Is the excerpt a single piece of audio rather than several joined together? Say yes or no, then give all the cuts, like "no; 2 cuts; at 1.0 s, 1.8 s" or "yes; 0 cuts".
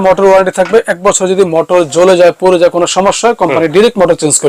yes; 0 cuts